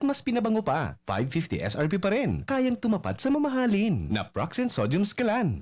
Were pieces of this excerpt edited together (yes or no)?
no